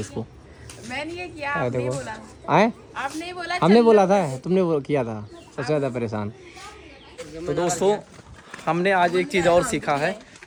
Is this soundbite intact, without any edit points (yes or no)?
yes